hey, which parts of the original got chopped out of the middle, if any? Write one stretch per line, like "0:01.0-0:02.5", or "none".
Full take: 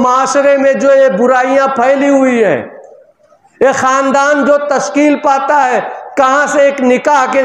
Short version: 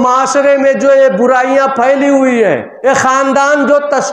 0:02.7-0:03.5